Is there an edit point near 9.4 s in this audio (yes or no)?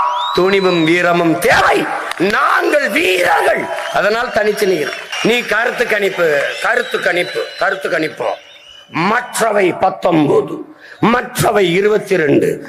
no